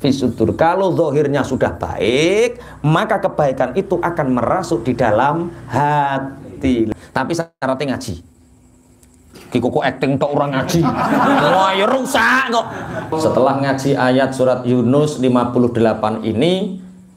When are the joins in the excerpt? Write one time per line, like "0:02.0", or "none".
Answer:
0:06.9
0:13.0